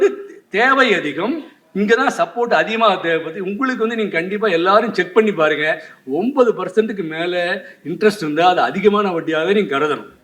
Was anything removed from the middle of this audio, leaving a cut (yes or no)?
no